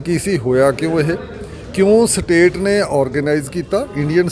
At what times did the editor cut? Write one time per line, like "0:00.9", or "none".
none